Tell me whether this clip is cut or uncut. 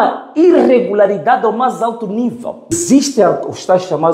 cut